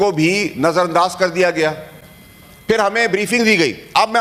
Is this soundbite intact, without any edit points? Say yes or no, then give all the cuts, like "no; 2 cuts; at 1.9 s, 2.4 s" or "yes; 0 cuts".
yes; 0 cuts